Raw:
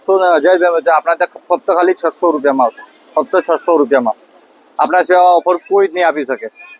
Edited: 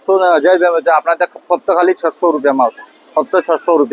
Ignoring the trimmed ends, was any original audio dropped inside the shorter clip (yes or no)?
no